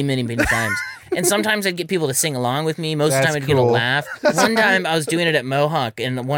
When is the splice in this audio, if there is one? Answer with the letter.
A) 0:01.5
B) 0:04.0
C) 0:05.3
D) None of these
B